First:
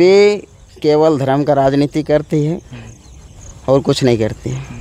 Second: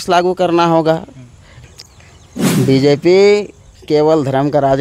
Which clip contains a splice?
second; 1 cut; at 1.4 s

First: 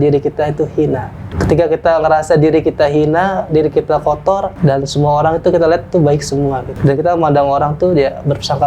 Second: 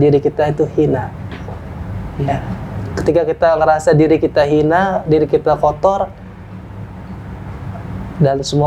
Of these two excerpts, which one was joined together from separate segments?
first; 3 cuts; at 1.2 s, 4.5 s, 6.7 s

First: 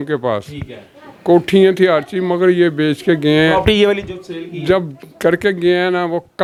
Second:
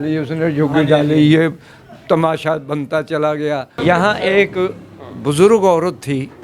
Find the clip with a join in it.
second; 1 cut; at 3.8 s

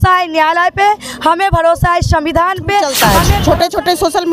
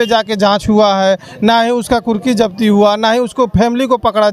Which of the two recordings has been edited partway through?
first; 1 cut; at 2.9 s

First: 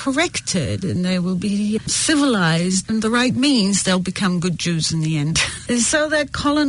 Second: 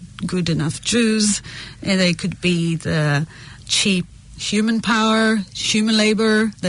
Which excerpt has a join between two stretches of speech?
first; 3 cuts; at 1.8 s, 2.8 s, 5.6 s

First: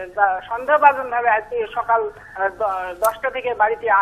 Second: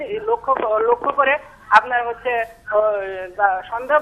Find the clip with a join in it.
first; 1 cut; at 2.4 s

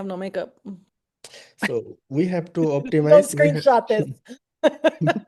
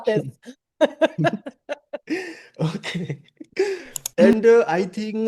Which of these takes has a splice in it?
second; 1 cut; at 4.0 s

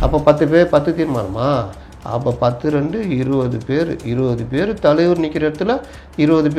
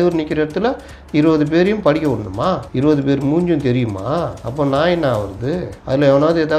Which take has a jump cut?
second; 3 cuts; at 2.7 s, 4.4 s, 5.7 s

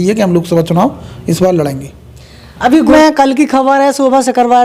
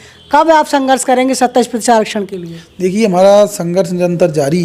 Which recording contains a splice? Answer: first; 1 cut; at 2.9 s

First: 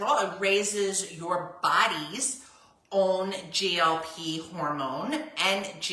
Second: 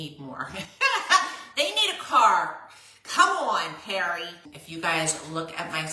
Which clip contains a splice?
second; 1 cut; at 4.6 s

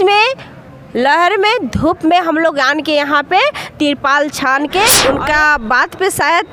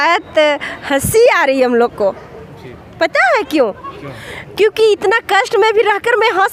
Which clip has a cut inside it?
first; 1 cut; at 5.0 s

